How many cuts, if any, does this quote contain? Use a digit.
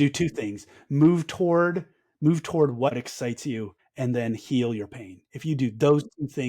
1